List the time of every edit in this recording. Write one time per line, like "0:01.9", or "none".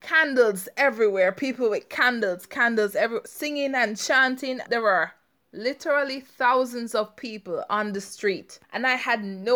0:04.6
0:08.5